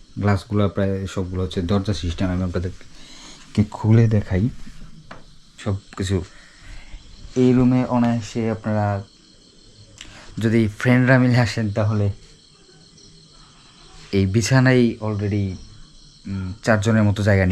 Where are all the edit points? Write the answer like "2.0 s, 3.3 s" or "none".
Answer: 5.4 s